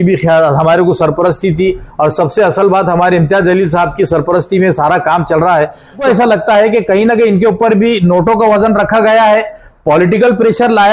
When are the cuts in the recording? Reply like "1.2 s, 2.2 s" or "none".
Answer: 6.0 s